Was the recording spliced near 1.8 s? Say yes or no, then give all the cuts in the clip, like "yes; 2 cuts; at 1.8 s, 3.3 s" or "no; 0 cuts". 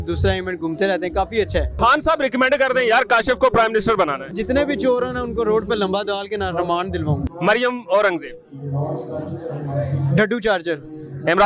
yes; 3 cuts; at 1.8 s, 4.4 s, 7.3 s